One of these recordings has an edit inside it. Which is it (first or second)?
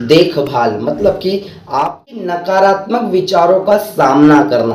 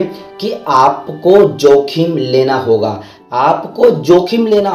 first